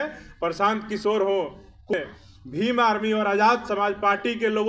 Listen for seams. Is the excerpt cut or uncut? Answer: cut